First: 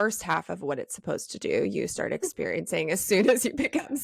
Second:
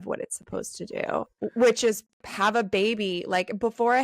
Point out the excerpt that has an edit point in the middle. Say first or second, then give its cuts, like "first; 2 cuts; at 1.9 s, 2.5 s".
second; 2 cuts; at 1.3 s, 2.1 s